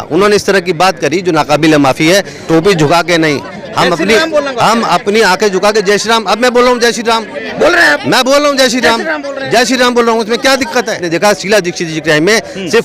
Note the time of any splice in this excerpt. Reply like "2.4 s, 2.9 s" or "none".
2.4 s, 11.0 s